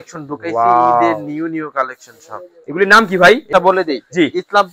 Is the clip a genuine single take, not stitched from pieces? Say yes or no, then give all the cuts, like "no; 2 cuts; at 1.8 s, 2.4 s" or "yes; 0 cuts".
no; 1 cut; at 3.5 s